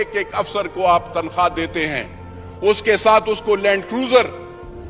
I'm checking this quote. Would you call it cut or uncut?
uncut